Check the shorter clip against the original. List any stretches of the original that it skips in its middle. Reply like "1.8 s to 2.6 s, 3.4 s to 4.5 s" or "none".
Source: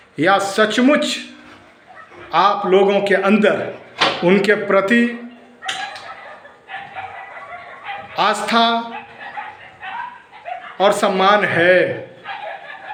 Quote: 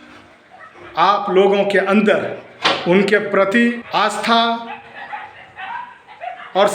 5.2 s to 8.1 s